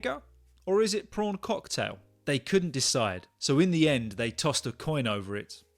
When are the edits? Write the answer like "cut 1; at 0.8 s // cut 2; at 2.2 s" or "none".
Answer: cut 1; at 2.1 s